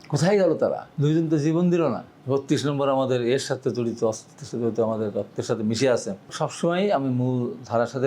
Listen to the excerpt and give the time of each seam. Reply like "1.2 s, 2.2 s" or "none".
0.9 s, 2.1 s, 6.3 s